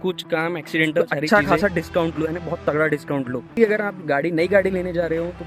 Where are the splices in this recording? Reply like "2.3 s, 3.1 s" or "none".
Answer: 1.2 s, 3.6 s